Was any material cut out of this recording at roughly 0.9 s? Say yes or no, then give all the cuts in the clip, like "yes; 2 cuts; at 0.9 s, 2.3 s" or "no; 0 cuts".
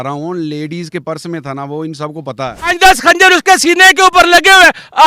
no; 1 cut; at 2.8 s